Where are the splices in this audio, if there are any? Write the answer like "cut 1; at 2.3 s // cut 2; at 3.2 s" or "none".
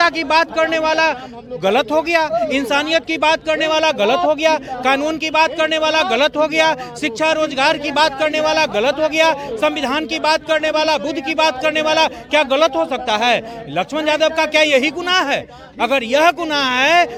none